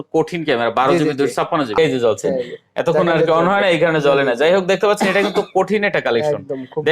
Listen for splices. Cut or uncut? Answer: cut